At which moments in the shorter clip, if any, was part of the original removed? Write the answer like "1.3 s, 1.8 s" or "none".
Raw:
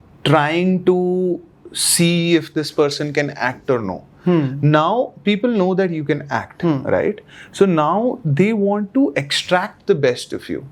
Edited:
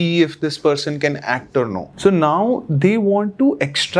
1.8 s